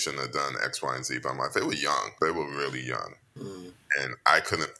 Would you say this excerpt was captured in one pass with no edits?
no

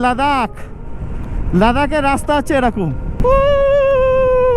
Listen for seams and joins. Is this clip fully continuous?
no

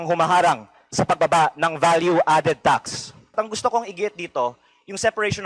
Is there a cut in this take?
yes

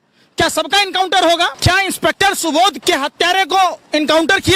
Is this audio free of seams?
no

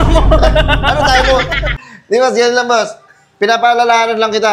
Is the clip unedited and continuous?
no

